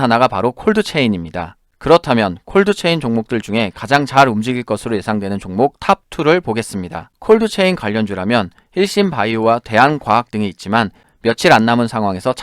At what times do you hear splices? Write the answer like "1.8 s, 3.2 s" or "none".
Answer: 1.7 s, 11.1 s